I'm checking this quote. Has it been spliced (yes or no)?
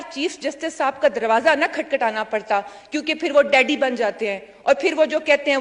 no